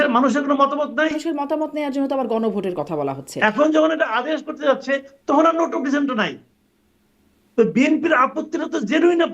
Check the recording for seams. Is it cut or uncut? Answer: cut